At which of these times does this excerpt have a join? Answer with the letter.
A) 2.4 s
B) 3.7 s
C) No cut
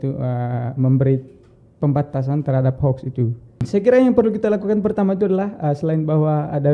B